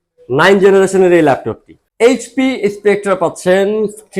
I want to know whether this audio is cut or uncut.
cut